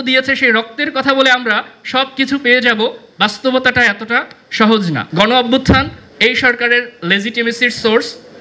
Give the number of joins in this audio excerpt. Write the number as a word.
one